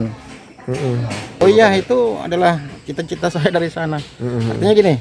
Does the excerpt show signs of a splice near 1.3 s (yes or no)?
yes